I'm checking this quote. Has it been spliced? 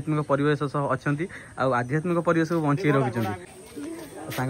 yes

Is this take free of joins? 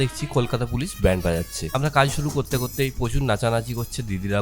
no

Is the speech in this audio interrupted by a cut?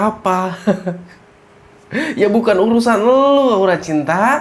no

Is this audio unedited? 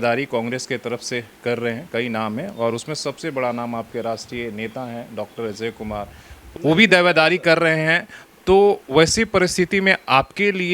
no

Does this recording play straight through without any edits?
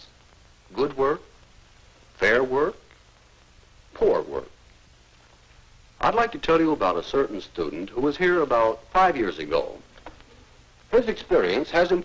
no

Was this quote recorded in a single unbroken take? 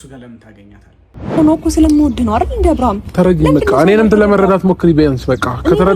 no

